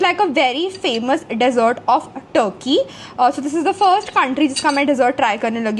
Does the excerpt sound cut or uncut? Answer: uncut